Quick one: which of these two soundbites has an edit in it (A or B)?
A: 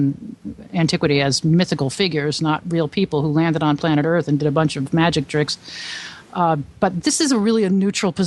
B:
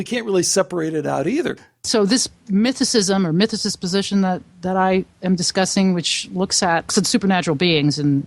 B